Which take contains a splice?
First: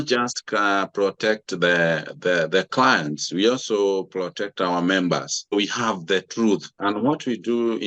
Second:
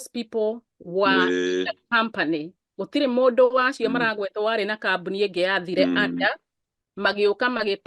first; 2 cuts; at 5.5 s, 6.8 s

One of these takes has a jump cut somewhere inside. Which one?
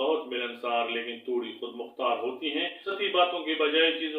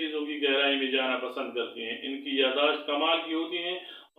first; 1 cut; at 2.8 s

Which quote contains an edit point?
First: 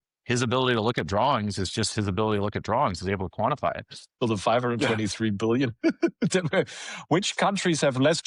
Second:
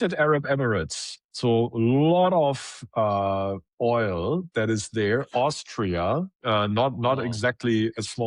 first; 1 cut; at 4.1 s

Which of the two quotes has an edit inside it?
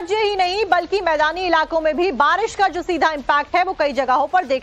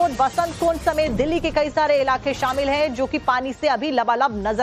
first; 1 cut; at 1.0 s

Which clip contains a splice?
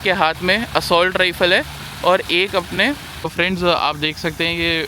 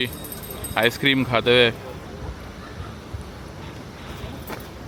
first; 1 cut; at 3.1 s

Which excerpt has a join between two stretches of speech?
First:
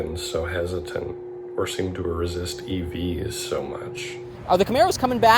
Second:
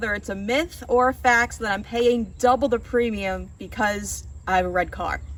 first; 1 cut; at 4.3 s

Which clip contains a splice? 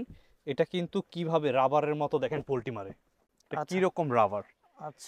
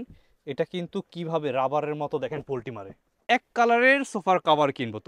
second; 1 cut; at 3.2 s

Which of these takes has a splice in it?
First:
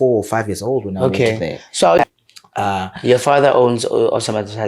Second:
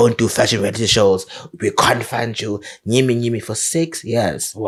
first; 1 cut; at 2.0 s

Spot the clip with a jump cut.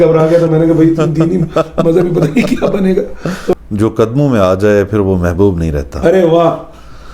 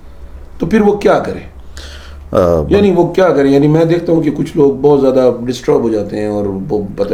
first; 1 cut; at 3.3 s

